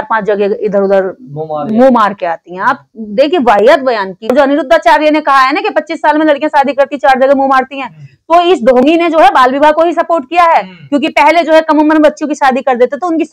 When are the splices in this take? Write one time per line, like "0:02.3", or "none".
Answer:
0:04.3